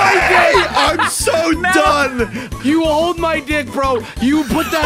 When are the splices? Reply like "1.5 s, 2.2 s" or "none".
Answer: 2.5 s